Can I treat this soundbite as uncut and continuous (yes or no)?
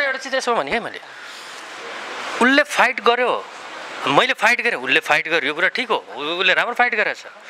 yes